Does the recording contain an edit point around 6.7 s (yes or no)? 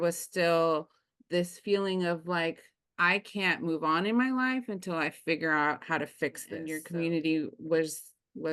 yes